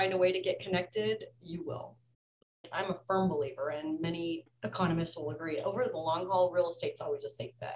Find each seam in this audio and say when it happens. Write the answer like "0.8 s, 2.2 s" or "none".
2.7 s, 4.5 s